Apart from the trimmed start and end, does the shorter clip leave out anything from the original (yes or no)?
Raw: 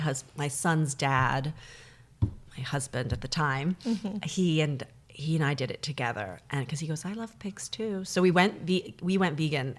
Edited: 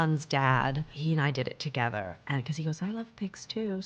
yes